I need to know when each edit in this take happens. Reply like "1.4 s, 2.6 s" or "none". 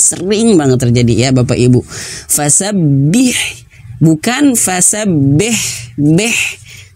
none